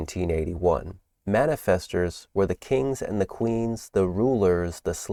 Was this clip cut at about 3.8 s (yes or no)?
no